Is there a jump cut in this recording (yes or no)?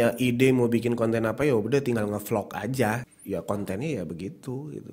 yes